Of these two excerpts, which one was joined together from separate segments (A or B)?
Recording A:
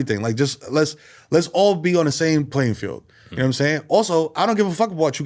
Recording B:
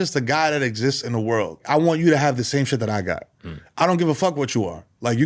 B